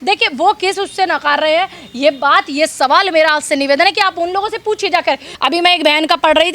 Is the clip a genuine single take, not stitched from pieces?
no; 1 cut; at 5.3 s

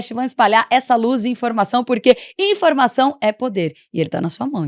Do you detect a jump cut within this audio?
no; 0 cuts

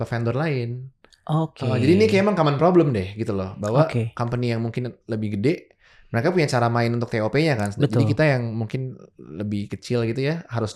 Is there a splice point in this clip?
no; 0 cuts

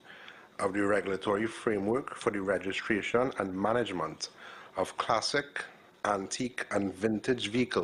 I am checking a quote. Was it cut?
no; 0 cuts

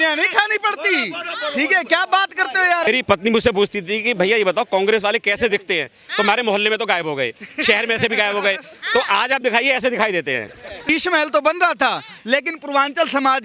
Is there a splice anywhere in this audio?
yes; 2 cuts; at 2.9 s, 10.9 s

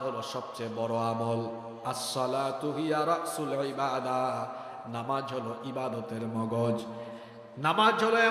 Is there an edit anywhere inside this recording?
no; 0 cuts

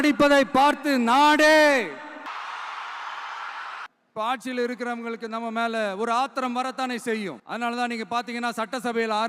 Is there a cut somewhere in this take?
yes; 3 cuts; at 2.3 s, 3.9 s, 7.4 s

